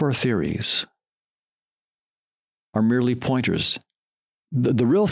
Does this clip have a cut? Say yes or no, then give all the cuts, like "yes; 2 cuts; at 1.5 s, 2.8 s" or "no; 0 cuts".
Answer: no; 0 cuts